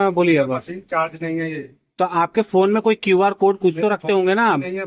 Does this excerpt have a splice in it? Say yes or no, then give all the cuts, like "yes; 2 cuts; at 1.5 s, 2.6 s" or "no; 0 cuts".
no; 0 cuts